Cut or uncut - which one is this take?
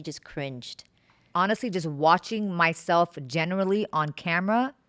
uncut